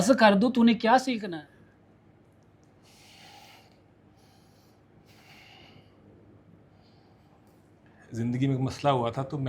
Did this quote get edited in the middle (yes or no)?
yes